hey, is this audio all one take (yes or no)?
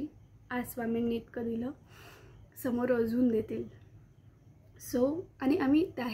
yes